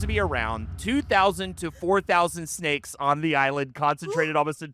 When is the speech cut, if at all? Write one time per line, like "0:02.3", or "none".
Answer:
none